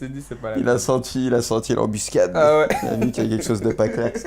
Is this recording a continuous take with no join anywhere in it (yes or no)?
yes